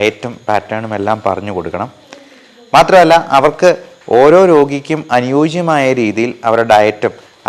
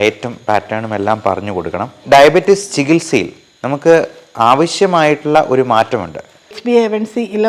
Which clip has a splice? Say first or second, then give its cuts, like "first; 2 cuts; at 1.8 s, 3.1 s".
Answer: second; 2 cuts; at 2.0 s, 6.6 s